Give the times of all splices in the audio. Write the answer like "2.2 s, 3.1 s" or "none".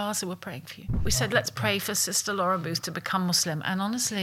1.0 s